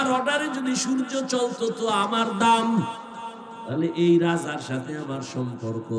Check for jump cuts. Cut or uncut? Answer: uncut